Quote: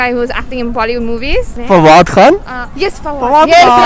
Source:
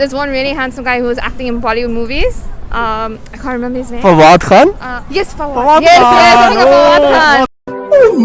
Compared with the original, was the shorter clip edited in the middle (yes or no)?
yes